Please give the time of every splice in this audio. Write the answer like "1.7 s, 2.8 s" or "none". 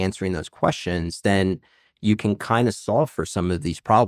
none